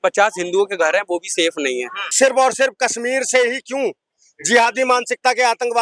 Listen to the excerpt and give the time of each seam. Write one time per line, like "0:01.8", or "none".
0:02.1